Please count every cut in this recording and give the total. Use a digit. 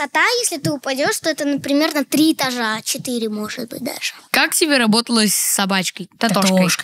0